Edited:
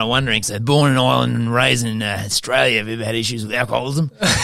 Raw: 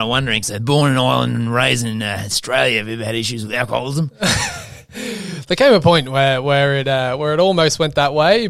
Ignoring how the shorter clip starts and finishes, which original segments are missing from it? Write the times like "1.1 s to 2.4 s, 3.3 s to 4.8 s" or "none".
none